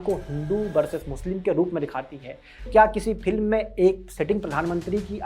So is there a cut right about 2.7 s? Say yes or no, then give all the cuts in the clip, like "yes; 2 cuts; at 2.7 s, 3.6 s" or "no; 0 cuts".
yes; 1 cut; at 2.7 s